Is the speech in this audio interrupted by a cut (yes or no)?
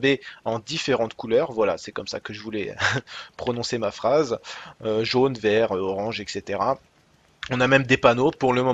yes